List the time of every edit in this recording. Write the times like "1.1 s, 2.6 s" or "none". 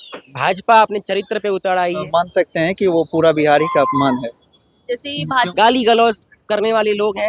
2.0 s, 5.5 s